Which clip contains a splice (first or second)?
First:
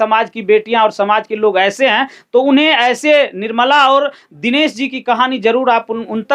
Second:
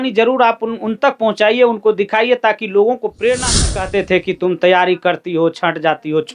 second